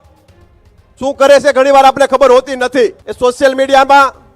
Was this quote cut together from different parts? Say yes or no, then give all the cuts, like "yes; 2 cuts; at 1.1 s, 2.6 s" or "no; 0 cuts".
yes; 1 cut; at 3.0 s